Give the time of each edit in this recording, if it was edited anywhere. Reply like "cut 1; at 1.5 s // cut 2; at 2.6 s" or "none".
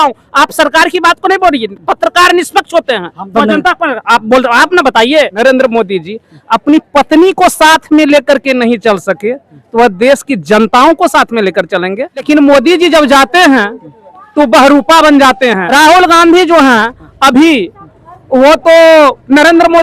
cut 1; at 5.3 s // cut 2; at 12.2 s // cut 3; at 15.6 s